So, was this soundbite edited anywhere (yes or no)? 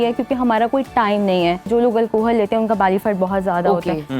yes